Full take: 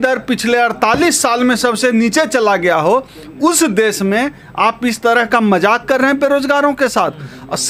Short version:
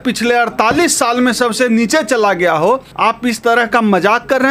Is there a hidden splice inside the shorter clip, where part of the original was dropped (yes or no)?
yes